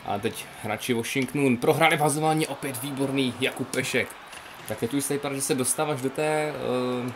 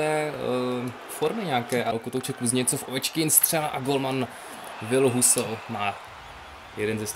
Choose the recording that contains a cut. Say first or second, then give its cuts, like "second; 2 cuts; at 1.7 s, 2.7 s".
second; 1 cut; at 1.9 s